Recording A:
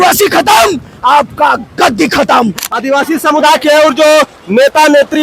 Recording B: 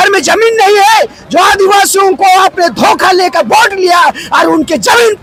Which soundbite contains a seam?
A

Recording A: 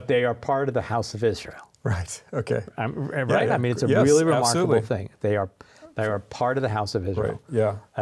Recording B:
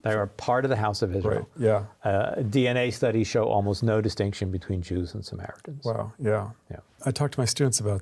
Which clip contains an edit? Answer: B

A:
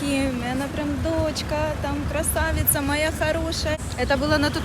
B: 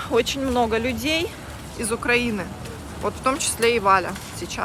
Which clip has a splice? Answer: A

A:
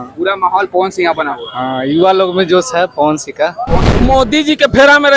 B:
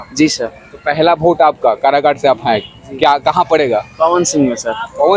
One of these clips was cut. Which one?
A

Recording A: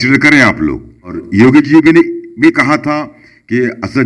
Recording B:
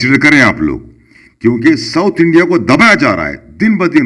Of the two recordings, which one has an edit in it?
A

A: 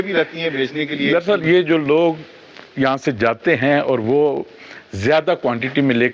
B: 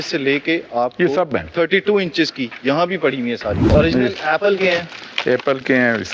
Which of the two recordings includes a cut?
B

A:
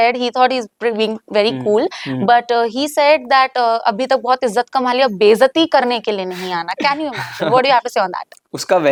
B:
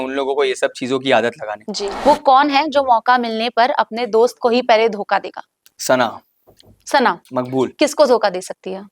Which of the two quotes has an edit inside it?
B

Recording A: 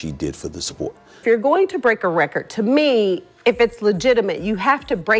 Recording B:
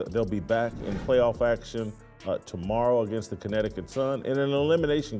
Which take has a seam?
A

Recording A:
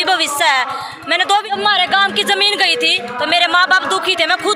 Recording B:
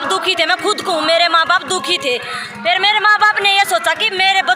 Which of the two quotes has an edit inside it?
A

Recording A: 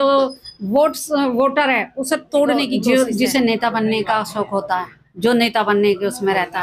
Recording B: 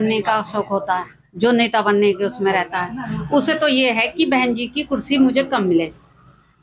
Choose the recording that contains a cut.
A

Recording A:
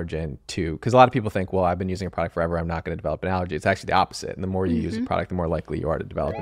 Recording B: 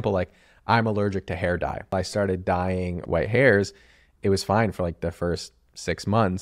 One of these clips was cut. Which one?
B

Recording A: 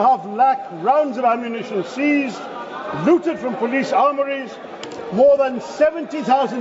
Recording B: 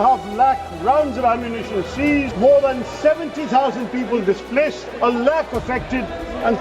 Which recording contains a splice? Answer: B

